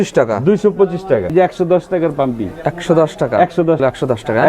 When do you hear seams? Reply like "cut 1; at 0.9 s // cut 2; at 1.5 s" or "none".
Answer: cut 1; at 1.3 s // cut 2; at 3.8 s